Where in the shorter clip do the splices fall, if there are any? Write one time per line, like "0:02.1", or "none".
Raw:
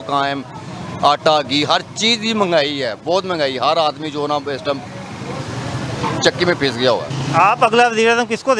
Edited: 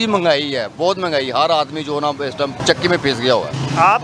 0:02.6